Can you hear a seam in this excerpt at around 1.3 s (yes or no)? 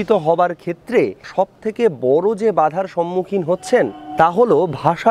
yes